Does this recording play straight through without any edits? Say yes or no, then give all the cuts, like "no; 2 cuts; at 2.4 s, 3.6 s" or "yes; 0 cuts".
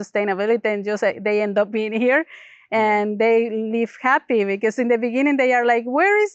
yes; 0 cuts